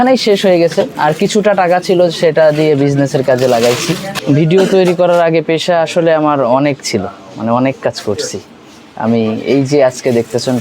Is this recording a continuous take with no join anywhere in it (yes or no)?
no